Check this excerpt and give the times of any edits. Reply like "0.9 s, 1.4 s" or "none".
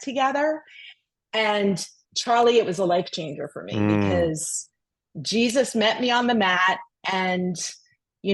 none